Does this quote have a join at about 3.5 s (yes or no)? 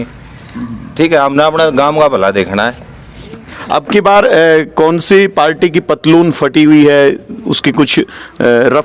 yes